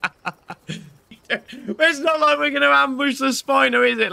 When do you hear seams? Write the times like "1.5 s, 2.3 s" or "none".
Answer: 1.2 s